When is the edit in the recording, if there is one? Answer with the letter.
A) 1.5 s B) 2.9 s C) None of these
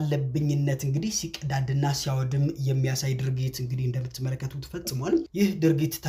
C